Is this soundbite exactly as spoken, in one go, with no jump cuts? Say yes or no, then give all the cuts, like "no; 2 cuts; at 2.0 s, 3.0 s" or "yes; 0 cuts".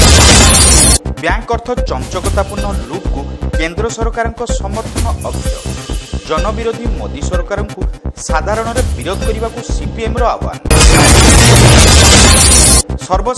no; 1 cut; at 0.9 s